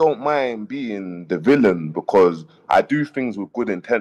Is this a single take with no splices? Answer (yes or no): yes